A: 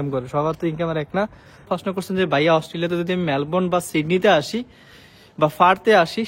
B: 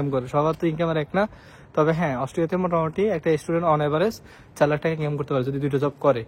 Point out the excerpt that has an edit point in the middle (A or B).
A